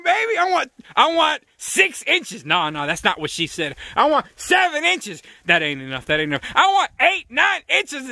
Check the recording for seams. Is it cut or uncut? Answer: uncut